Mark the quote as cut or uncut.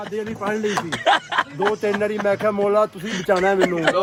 uncut